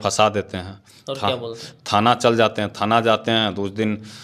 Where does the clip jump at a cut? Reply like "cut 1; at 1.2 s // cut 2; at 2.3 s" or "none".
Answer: none